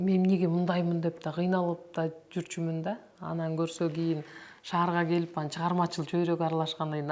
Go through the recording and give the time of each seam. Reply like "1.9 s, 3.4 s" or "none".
none

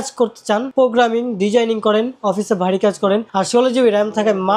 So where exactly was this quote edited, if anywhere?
none

